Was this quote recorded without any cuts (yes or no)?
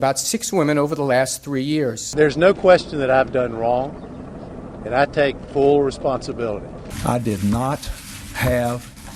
yes